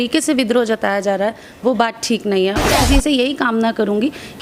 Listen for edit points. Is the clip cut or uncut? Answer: cut